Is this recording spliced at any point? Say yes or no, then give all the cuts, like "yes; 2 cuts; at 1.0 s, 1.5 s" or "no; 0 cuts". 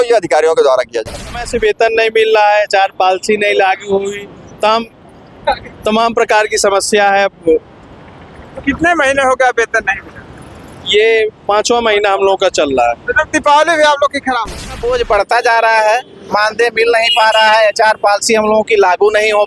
yes; 2 cuts; at 1.4 s, 14.7 s